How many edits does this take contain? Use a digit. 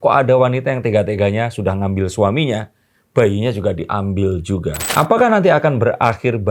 1